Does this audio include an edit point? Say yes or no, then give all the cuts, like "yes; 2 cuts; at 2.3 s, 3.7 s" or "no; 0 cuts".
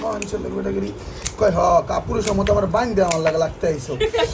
no; 0 cuts